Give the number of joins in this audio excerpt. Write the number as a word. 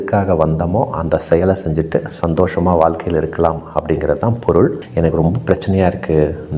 one